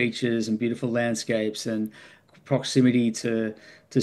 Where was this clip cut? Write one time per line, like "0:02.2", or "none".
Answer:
0:02.1